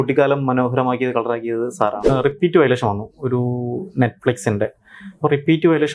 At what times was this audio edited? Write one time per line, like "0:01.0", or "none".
0:02.0